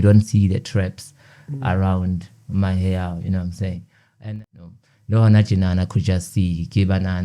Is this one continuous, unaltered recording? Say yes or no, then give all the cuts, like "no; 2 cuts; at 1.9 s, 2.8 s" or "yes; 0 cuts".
no; 1 cut; at 4.2 s